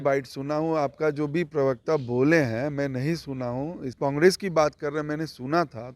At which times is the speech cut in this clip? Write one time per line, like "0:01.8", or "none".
0:03.9